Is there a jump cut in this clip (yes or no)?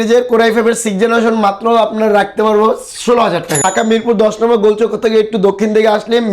yes